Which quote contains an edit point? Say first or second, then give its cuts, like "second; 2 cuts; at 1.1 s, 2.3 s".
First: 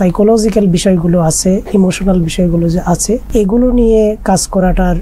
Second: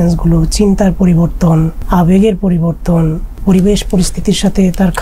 second; 2 cuts; at 1.8 s, 3.4 s